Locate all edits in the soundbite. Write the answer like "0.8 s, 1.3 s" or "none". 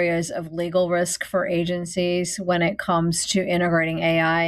none

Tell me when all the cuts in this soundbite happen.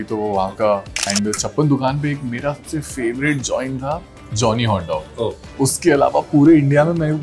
1.0 s, 5.4 s

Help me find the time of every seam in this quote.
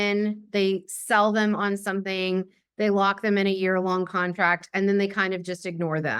none

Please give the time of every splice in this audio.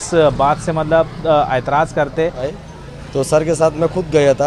2.6 s

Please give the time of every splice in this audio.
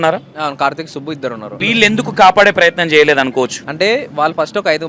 1.6 s, 3.6 s

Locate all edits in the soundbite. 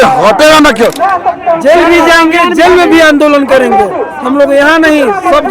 1.0 s

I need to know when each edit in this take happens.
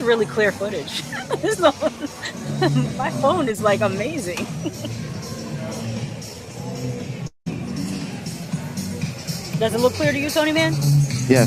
none

